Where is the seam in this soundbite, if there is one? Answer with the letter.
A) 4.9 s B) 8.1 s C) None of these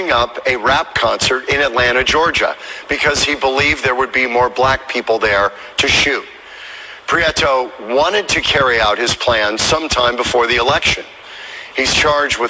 B